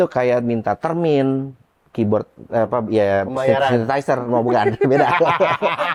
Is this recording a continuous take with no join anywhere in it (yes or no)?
yes